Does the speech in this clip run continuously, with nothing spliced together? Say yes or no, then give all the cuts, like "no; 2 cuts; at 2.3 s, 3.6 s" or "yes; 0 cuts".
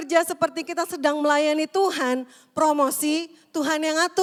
yes; 0 cuts